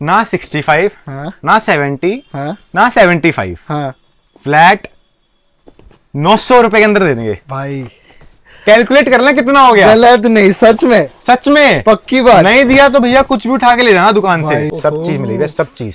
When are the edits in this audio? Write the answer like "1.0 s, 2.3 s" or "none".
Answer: 14.7 s